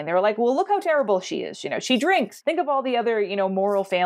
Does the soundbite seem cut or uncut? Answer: uncut